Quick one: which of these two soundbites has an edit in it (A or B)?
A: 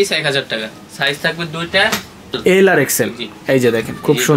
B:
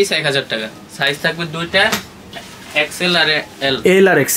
A